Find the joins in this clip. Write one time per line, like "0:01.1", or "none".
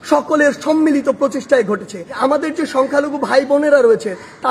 0:02.2